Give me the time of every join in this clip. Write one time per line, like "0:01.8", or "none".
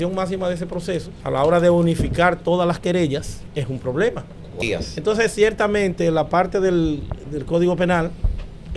0:01.1
0:03.4
0:04.6